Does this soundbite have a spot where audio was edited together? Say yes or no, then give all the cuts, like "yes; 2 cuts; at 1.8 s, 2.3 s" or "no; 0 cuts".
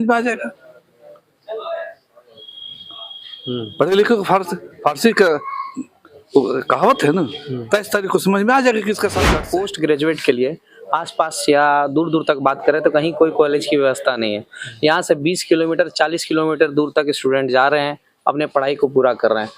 yes; 1 cut; at 9.2 s